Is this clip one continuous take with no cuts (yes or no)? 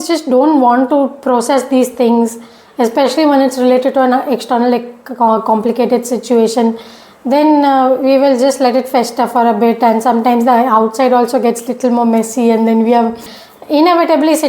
no